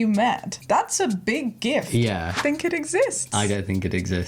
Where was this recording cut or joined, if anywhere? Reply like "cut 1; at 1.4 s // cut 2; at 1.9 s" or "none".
cut 1; at 2.4 s